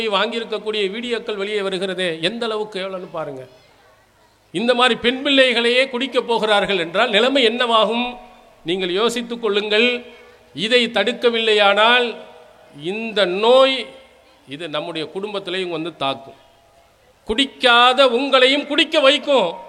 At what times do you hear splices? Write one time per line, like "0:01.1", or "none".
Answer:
none